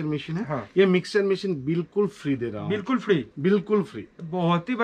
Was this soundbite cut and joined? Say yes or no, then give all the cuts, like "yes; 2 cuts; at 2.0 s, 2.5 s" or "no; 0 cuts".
no; 0 cuts